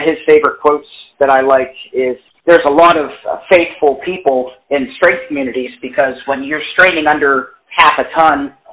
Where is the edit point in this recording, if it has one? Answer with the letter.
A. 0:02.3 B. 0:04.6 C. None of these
A